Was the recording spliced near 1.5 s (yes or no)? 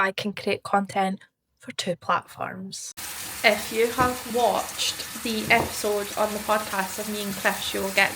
no